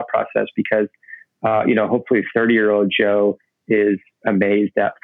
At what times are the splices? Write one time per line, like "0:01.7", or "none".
none

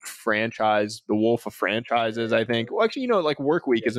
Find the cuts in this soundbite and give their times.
none

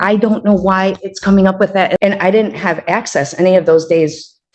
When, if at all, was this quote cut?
0:02.0

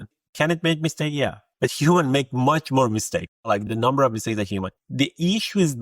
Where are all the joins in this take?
0:01.4

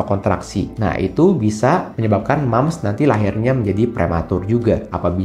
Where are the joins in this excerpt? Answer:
none

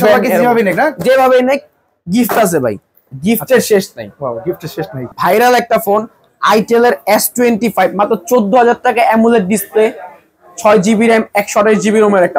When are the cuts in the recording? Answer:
0:05.1

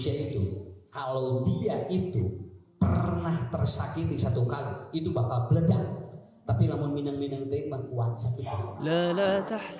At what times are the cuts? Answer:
0:08.8

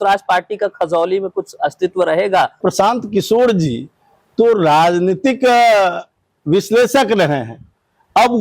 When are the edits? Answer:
0:02.6

